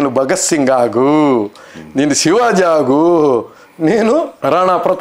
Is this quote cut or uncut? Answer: uncut